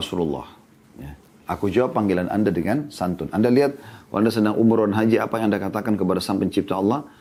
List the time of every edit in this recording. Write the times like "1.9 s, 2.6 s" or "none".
none